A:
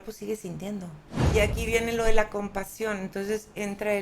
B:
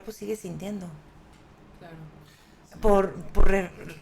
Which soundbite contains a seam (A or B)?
A